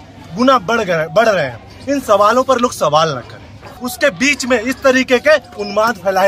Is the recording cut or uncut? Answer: cut